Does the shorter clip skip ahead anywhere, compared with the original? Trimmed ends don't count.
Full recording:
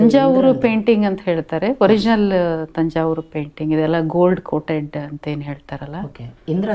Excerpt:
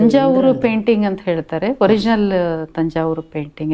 no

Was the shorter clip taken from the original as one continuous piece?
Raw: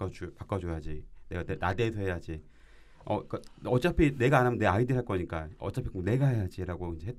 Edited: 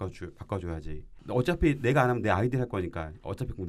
no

